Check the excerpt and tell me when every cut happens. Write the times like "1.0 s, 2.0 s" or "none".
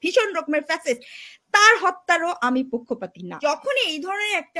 3.4 s